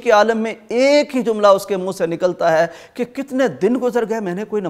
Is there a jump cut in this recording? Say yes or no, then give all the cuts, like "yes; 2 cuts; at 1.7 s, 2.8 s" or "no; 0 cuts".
no; 0 cuts